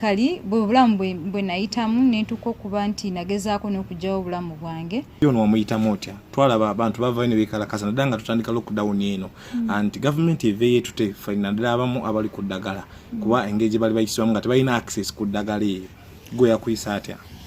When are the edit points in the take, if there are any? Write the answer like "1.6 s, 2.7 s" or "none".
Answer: 5.2 s